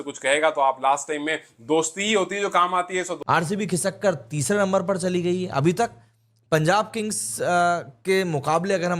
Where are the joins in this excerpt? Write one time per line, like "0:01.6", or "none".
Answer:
0:03.1

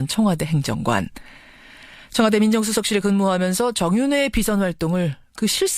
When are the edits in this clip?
0:01.1

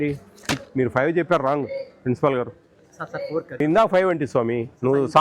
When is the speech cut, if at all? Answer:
0:03.6

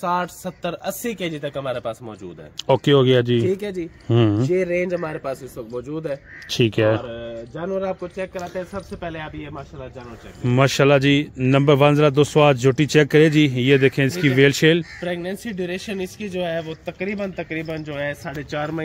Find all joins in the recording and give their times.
none

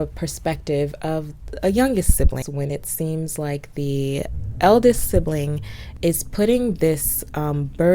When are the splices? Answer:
0:02.4

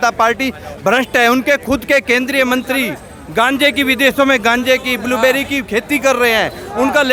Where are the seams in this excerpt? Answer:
none

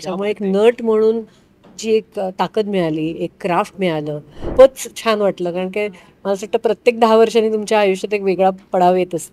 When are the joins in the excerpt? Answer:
0:04.4

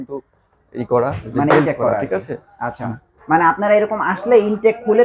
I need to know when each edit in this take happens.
none

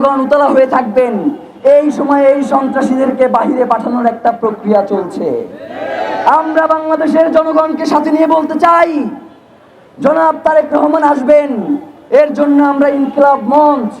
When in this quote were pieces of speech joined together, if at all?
none

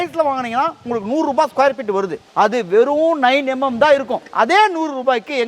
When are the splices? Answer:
0:02.2
0:04.2

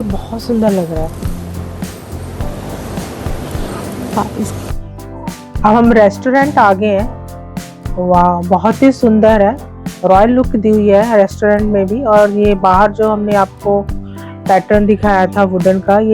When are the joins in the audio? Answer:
0:05.0

